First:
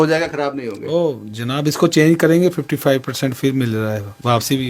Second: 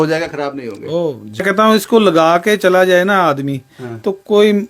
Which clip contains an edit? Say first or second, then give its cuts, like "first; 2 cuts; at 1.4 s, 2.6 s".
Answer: second; 1 cut; at 1.4 s